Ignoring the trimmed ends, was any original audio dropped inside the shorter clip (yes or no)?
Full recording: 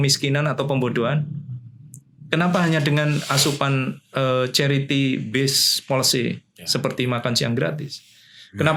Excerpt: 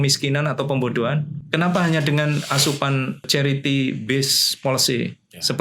yes